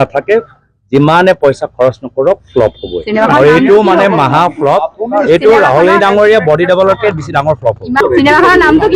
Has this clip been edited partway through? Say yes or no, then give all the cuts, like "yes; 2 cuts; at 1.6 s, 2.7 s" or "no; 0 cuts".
yes; 1 cut; at 8.0 s